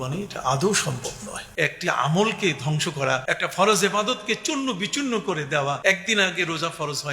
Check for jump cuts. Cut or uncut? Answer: cut